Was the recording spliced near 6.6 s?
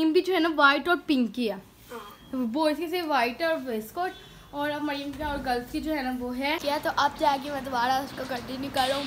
yes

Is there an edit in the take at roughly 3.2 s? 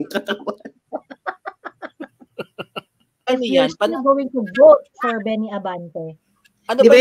yes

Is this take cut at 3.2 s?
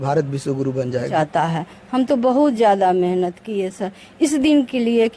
no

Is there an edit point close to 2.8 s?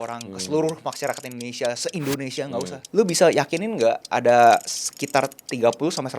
yes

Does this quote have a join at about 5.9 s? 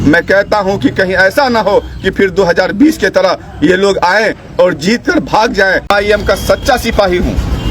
yes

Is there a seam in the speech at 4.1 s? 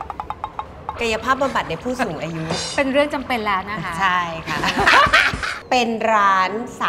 no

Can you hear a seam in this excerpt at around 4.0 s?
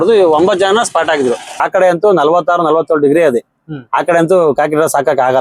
no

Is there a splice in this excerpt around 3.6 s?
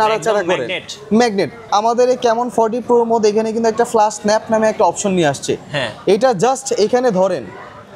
no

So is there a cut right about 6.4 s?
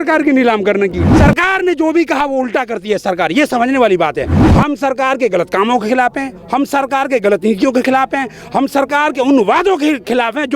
no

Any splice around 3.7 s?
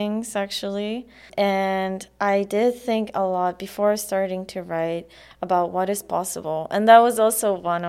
no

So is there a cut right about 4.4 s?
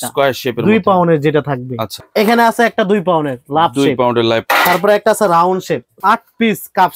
yes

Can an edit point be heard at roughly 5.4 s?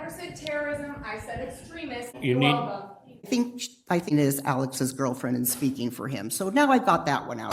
no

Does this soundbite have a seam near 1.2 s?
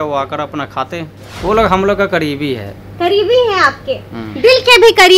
yes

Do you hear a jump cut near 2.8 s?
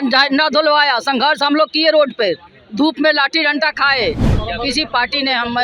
no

